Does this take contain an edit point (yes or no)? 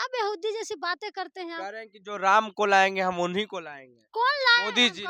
no